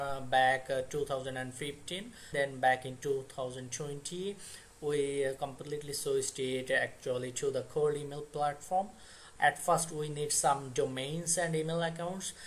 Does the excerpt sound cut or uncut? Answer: cut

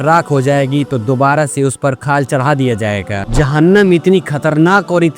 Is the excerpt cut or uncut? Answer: cut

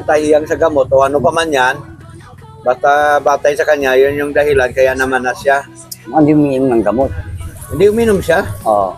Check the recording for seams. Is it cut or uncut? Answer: uncut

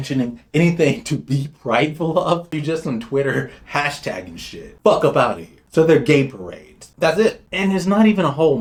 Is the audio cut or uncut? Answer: uncut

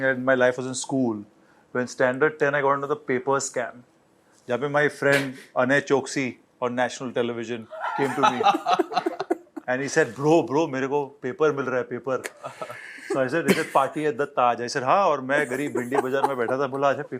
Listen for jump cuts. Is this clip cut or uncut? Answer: uncut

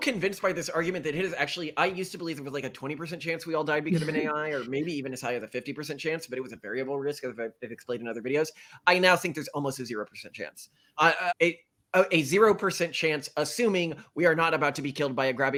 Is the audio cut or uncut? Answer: uncut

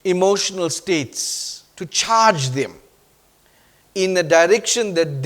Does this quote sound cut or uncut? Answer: uncut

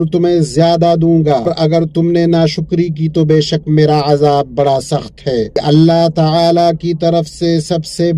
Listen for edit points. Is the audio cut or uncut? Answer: cut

